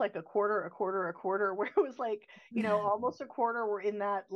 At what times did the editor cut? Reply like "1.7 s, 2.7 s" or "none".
none

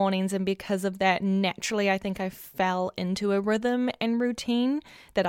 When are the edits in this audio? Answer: none

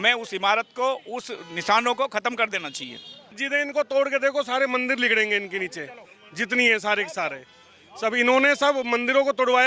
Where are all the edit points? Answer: 3.4 s

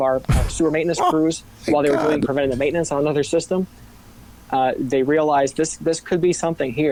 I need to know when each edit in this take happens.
none

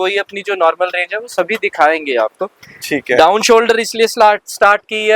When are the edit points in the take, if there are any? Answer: none

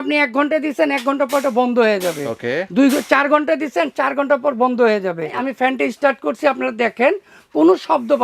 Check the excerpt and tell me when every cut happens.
5.4 s

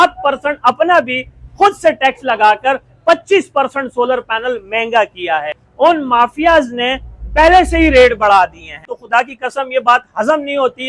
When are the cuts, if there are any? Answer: 5.6 s, 8.9 s

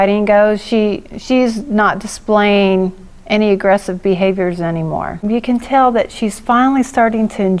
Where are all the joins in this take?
5.2 s

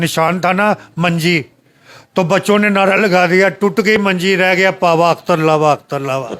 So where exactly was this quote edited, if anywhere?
none

